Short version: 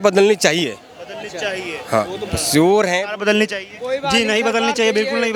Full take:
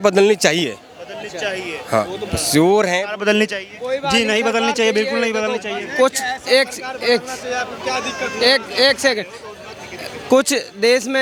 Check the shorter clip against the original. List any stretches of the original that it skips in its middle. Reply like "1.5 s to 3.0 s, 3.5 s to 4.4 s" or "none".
none